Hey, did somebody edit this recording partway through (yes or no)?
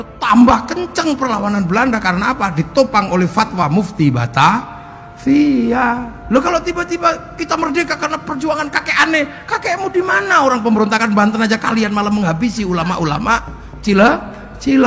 no